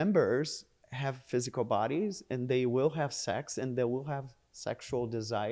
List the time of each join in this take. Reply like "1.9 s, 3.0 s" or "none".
none